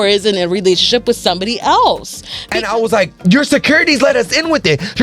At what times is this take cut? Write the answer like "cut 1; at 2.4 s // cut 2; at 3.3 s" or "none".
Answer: cut 1; at 2.6 s

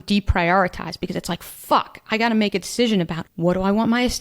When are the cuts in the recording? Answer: cut 1; at 3.2 s

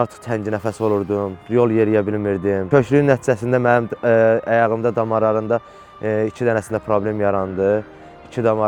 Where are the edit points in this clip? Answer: none

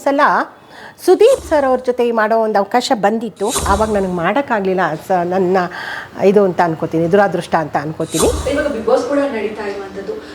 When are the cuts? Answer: cut 1; at 1.4 s // cut 2; at 3.6 s // cut 3; at 8.4 s

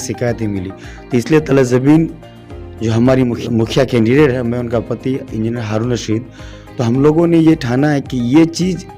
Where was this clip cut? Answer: cut 1; at 3.4 s

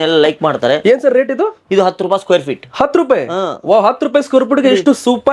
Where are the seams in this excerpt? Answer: none

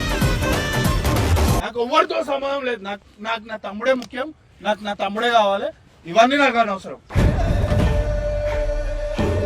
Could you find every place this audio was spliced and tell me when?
none

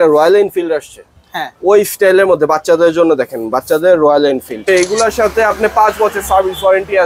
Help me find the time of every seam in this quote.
cut 1; at 4.7 s

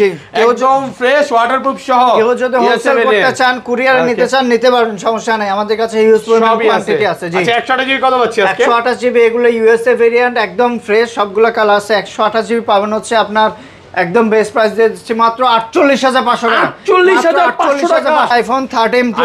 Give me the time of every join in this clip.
cut 1; at 18.3 s

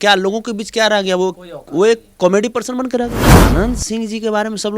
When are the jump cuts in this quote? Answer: cut 1; at 3.3 s

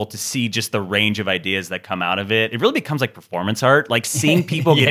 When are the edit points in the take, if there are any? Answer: cut 1; at 2.5 s

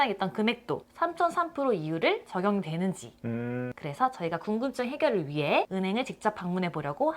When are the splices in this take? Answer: cut 1; at 5.7 s

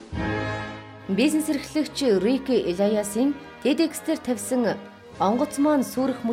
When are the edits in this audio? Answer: cut 1; at 1.0 s

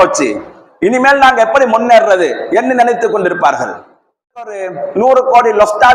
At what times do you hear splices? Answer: cut 1; at 4.5 s

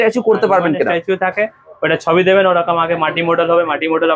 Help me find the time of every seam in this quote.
none

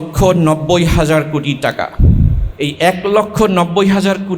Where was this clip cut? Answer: cut 1; at 2.4 s

